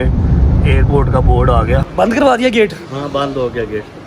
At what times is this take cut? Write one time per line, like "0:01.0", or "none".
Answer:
0:02.0